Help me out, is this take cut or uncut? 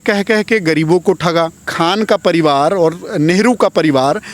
cut